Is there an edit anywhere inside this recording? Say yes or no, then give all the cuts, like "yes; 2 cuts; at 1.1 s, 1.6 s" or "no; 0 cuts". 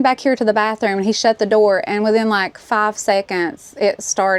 no; 0 cuts